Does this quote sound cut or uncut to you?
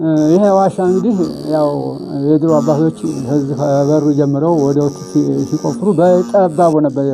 uncut